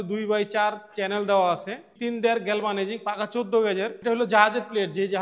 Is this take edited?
yes; 2 cuts; at 1.9 s, 4.0 s

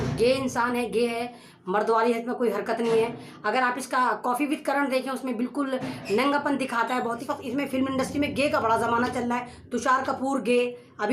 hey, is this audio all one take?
no; 1 cut; at 7.2 s

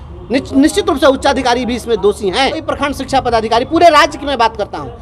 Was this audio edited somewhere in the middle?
yes; 1 cut; at 2.7 s

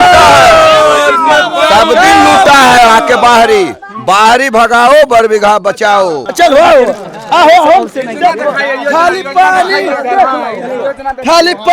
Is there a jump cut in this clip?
yes; 1 cut; at 6.2 s

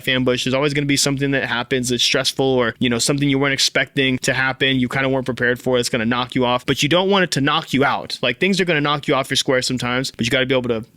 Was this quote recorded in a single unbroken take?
no; 4 cuts; at 2.7 s, 4.2 s, 6.6 s, 10.1 s

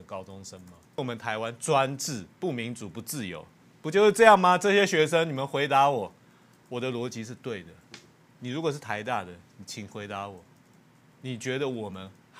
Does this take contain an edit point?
yes; 1 cut; at 1.0 s

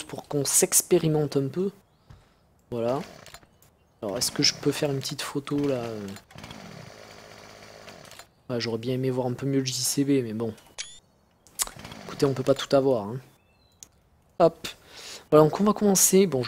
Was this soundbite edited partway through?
no; 0 cuts

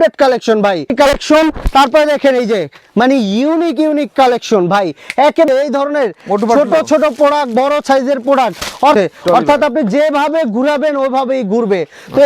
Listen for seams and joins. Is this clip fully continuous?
no; 3 cuts; at 0.9 s, 5.5 s, 8.9 s

